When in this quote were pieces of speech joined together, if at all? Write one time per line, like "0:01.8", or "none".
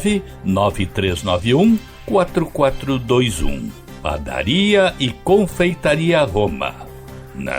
none